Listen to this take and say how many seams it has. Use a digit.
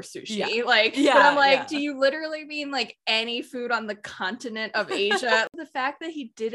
1